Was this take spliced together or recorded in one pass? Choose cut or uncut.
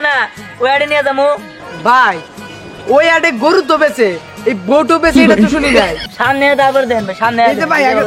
cut